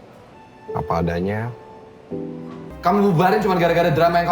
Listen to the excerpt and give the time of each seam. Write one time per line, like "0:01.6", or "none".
0:02.7